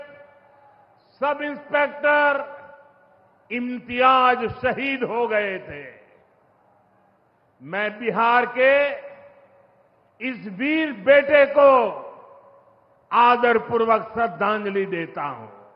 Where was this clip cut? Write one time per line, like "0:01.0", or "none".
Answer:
none